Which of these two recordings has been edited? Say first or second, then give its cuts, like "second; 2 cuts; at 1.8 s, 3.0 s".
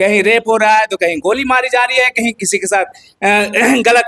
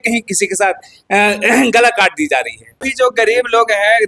second; 1 cut; at 2.9 s